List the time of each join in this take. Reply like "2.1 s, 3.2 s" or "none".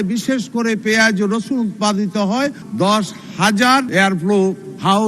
2.6 s, 3.9 s